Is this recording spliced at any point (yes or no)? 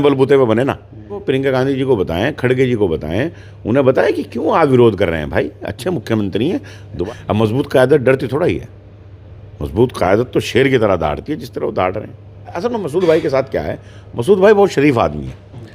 yes